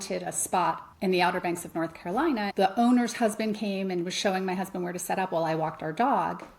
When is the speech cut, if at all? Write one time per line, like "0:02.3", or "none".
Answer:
0:00.9
0:02.5

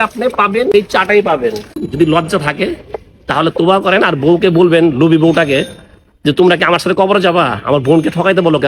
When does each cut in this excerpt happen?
0:00.7
0:01.8

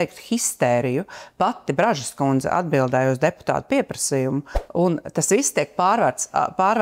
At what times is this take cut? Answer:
0:04.6

